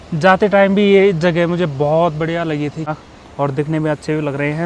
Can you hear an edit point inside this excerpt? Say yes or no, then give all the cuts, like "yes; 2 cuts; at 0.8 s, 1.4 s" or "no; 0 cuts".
yes; 1 cut; at 3.0 s